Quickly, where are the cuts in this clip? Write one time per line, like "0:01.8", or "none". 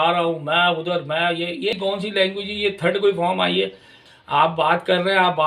0:01.7
0:04.1